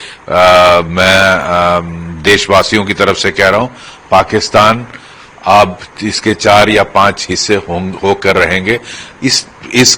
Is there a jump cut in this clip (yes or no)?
no